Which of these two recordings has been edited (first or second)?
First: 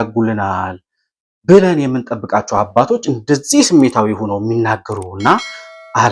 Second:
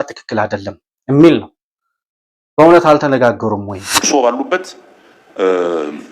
second